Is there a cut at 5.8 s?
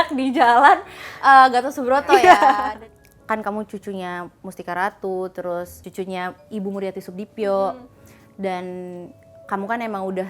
yes; 2 cuts; at 2.8 s, 5.8 s

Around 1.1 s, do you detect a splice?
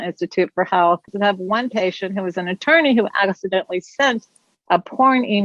yes; 1 cut; at 1.1 s

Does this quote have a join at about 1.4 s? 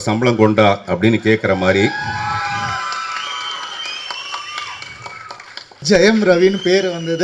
no; 1 cut; at 5.8 s

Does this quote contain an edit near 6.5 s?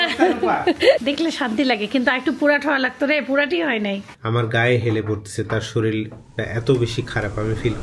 no; 2 cuts; at 1.0 s, 4.1 s

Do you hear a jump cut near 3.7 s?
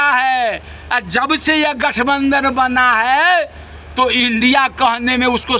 no; 0 cuts

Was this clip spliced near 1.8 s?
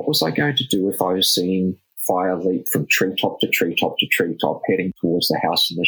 no; 1 cut; at 4.9 s

